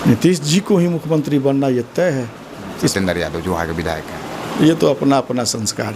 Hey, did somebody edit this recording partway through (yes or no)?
yes